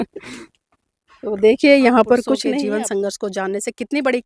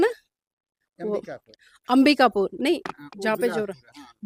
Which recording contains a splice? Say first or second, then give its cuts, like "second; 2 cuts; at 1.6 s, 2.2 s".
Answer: first; 1 cut; at 2.5 s